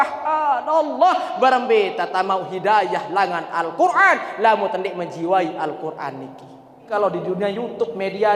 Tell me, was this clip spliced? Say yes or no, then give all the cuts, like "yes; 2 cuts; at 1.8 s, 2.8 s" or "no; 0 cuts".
yes; 1 cut; at 6.8 s